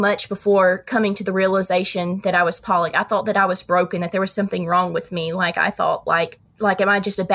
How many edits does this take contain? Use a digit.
1